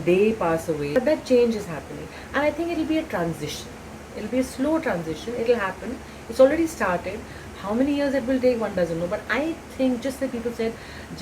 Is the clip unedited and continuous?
no; 1 cut; at 1.0 s

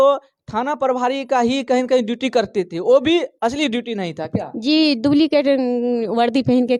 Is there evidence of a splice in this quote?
no; 0 cuts

